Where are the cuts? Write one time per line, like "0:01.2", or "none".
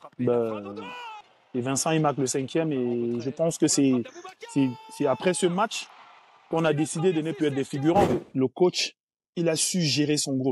0:08.1
0:09.2